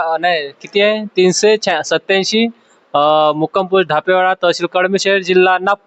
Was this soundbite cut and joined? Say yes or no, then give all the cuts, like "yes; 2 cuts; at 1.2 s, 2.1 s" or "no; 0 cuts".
no; 0 cuts